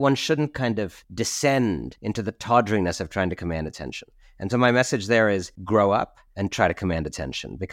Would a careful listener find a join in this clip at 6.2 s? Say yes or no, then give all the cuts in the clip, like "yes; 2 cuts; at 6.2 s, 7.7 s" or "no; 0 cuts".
yes; 4 cuts; at 1.0 s, 1.9 s, 5.5 s, 6.2 s